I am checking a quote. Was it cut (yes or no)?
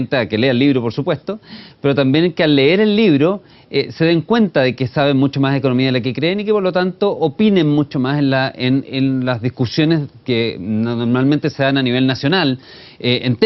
no